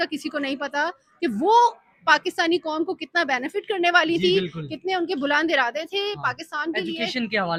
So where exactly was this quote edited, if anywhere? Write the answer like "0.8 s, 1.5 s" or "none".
none